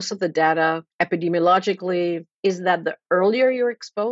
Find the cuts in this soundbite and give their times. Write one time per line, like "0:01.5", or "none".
0:00.9
0:02.3